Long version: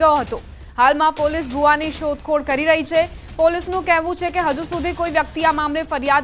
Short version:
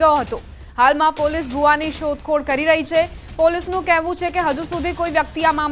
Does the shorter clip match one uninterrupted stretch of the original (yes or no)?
yes